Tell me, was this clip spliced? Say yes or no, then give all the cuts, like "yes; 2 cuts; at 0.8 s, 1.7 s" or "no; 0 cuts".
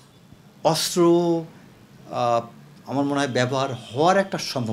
no; 0 cuts